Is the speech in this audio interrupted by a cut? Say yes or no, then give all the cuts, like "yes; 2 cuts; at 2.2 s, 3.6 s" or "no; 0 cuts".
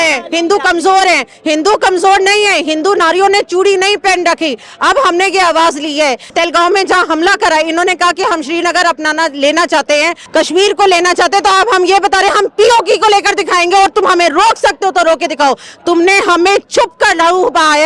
yes; 2 cuts; at 6.3 s, 10.2 s